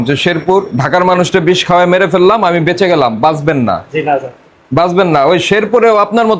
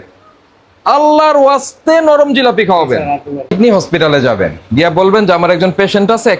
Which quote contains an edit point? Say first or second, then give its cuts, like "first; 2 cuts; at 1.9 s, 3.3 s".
second; 1 cut; at 3.5 s